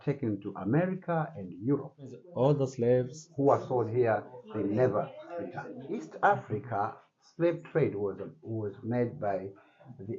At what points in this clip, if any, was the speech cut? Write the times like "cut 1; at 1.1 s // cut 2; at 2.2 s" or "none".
cut 1; at 2.2 s // cut 2; at 6.1 s